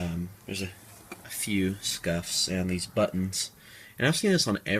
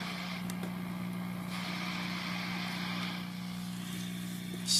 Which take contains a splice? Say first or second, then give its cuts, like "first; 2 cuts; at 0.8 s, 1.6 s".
first; 1 cut; at 1.6 s